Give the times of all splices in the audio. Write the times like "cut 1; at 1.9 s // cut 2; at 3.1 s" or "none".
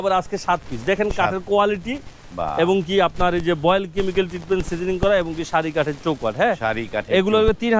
none